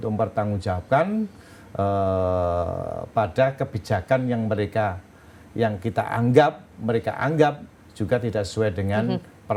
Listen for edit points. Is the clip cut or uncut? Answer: uncut